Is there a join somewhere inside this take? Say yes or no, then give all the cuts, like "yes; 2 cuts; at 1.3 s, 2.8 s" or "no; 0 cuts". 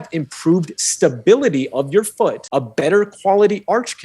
yes; 1 cut; at 2.4 s